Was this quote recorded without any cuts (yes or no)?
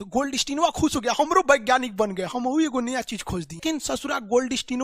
no